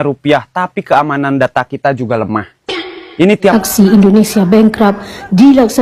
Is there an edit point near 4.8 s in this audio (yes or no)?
no